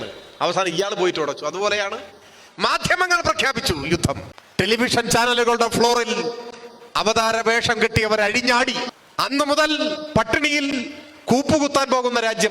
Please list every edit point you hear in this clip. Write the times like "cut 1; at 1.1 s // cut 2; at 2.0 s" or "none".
cut 1; at 4.4 s // cut 2; at 9.0 s